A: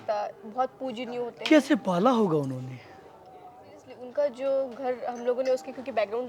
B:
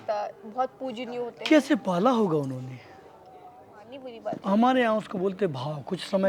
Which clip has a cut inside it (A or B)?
B